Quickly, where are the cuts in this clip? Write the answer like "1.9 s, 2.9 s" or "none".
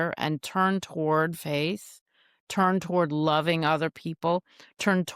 none